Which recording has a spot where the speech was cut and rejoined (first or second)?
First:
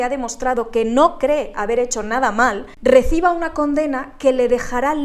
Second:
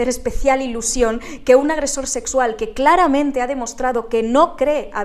first